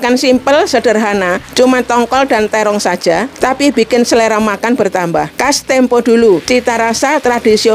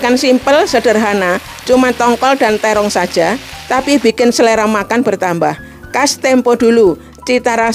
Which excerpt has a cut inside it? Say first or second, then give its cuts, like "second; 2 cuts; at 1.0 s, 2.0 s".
first; 4 cuts; at 1.4 s, 3.3 s, 5.3 s, 6.4 s